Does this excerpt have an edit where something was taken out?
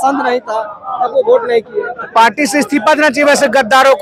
no; 0 cuts

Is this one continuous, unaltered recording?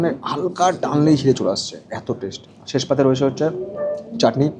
yes; 0 cuts

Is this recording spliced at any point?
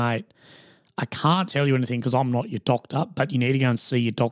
no; 0 cuts

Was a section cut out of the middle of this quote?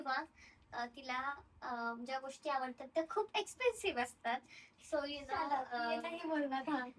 no; 0 cuts

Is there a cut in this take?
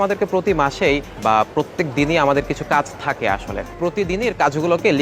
yes; 2 cuts; at 1.1 s, 3.6 s

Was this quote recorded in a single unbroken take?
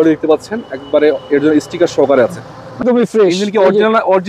no; 1 cut; at 2.8 s

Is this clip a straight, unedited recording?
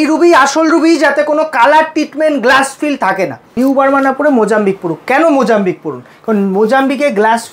no; 1 cut; at 3.4 s

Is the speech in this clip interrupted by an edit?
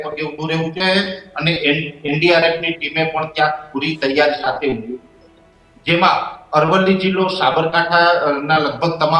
no; 0 cuts

